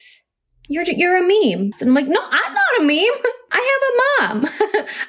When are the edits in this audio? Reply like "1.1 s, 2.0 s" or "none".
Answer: 1.7 s, 3.4 s